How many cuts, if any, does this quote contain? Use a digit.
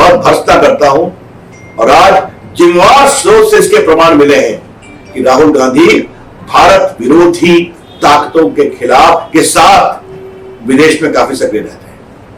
0